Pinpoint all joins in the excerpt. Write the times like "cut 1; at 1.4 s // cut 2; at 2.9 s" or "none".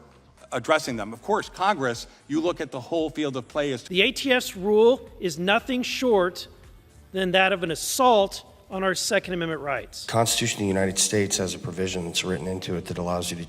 cut 1; at 3.9 s // cut 2; at 9.9 s

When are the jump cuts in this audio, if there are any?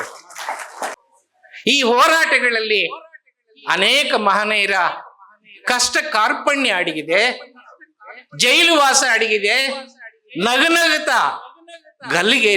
cut 1; at 1.0 s

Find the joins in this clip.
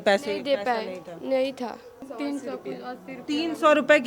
cut 1; at 2.0 s

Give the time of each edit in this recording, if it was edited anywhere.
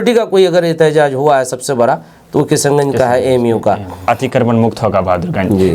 cut 1; at 4.0 s

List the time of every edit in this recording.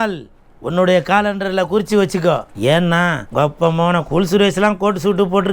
cut 1; at 2.5 s // cut 2; at 3.2 s

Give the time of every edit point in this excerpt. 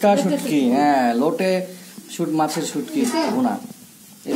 none

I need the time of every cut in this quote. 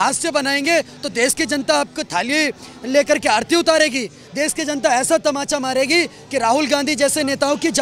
none

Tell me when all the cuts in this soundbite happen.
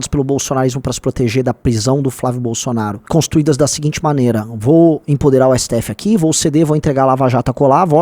cut 1; at 3.0 s

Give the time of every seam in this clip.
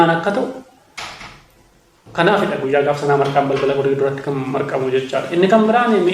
none

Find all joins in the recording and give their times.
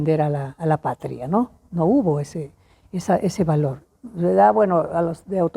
none

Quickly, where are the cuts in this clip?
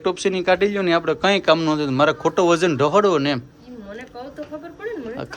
none

